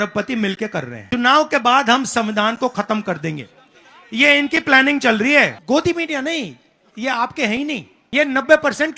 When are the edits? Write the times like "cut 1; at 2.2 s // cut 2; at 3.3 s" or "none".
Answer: cut 1; at 1.0 s // cut 2; at 5.6 s // cut 3; at 7.9 s